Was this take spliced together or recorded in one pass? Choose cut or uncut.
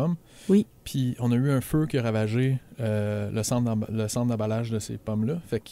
uncut